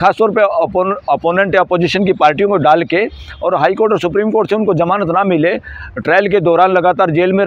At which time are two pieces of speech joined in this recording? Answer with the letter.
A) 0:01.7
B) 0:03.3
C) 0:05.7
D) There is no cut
D